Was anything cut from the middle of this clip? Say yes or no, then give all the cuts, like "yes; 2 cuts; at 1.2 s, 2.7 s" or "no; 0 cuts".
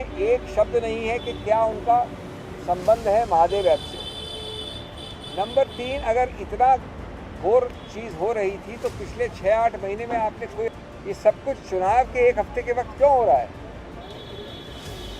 yes; 1 cut; at 10.7 s